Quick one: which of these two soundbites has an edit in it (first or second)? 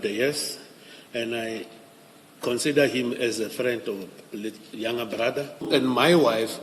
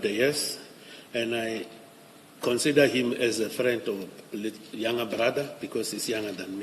first